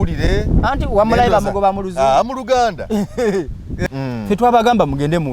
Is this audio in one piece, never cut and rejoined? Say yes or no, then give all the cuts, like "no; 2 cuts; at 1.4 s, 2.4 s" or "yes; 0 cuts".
no; 1 cut; at 3.9 s